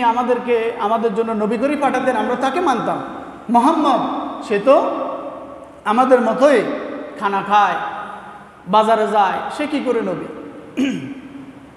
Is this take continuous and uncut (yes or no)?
yes